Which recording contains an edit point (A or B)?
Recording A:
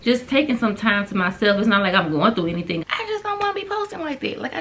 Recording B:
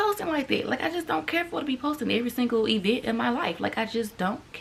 A